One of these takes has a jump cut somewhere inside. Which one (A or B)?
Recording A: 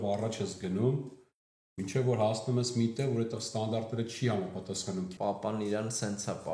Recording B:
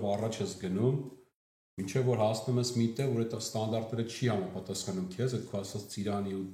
A